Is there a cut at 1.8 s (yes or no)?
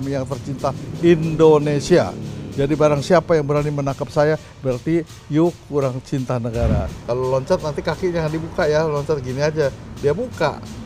no